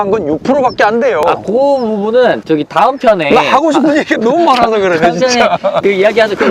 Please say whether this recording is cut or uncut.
uncut